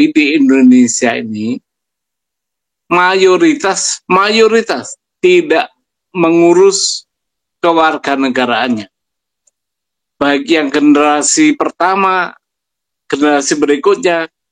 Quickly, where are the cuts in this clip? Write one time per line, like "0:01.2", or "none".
none